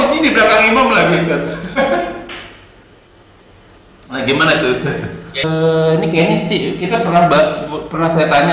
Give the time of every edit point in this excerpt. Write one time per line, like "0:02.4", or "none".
0:05.4